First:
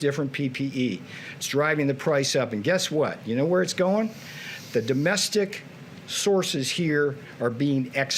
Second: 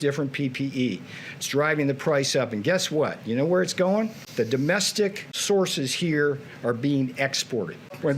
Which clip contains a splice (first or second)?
second